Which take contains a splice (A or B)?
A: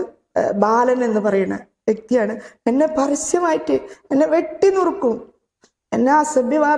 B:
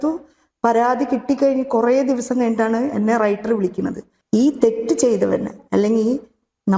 B